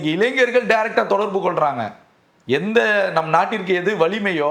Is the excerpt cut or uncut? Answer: uncut